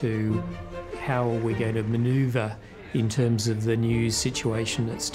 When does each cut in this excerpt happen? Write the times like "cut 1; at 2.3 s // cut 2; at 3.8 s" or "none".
none